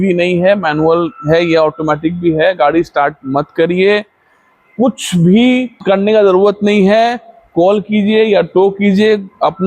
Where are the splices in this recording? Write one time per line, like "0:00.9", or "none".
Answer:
0:05.7